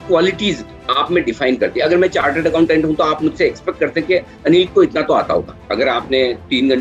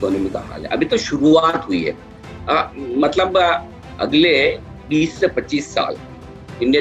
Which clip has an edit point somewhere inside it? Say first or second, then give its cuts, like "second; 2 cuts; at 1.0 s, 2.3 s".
first; 1 cut; at 5.6 s